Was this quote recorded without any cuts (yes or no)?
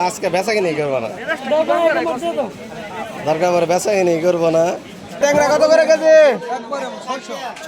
no